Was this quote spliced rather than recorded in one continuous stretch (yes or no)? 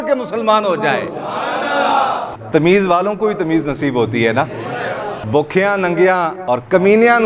yes